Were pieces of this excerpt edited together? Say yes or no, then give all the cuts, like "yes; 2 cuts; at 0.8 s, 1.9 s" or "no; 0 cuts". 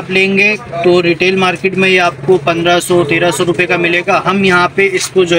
no; 0 cuts